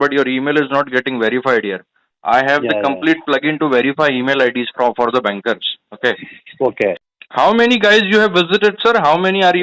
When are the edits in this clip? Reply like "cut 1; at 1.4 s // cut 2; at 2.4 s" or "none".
cut 1; at 7.1 s